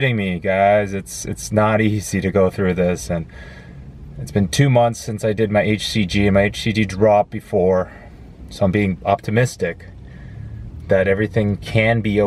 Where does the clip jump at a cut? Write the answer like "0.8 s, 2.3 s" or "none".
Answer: none